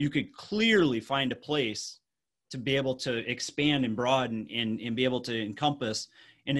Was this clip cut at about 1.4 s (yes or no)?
no